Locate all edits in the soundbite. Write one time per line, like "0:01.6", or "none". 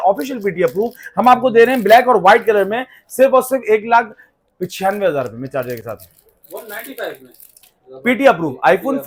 none